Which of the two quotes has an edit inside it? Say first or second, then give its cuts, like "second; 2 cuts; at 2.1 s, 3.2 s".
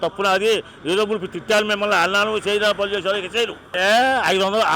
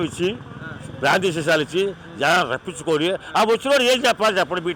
first; 1 cut; at 3.7 s